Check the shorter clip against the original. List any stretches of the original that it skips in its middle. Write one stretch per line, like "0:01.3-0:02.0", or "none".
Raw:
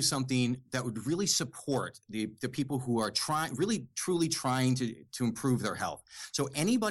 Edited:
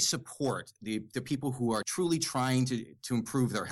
0:03.1-0:04.0